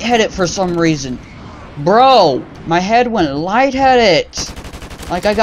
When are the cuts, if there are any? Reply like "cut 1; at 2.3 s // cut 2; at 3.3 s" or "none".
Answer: cut 1; at 2.5 s